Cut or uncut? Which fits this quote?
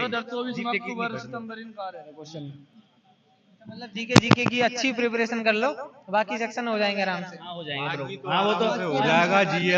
uncut